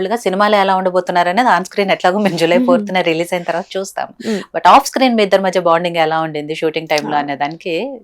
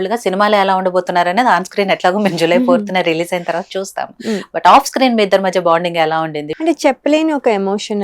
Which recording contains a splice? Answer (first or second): second